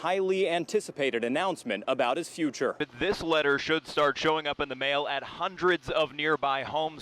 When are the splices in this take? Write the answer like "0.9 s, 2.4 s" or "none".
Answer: 2.8 s